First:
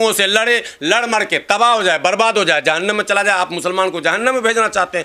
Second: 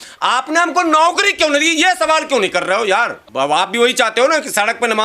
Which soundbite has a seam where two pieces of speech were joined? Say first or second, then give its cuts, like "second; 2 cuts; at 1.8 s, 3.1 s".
second; 1 cut; at 3.2 s